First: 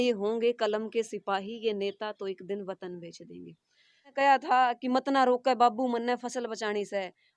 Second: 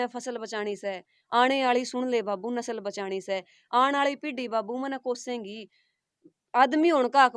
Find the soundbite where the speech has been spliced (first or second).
first